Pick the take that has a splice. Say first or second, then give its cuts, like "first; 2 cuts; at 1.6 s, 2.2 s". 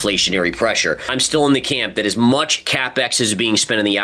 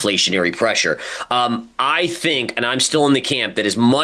first; 1 cut; at 1.1 s